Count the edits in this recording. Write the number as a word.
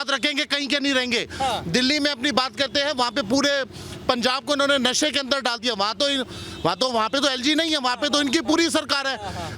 zero